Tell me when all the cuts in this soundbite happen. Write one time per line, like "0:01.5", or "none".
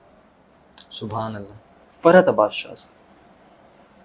0:01.8